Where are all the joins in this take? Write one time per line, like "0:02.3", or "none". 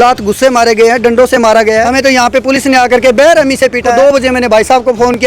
0:01.8
0:03.9